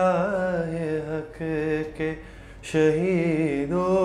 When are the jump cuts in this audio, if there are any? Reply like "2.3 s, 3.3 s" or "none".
none